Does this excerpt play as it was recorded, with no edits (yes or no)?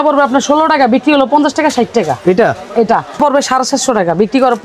no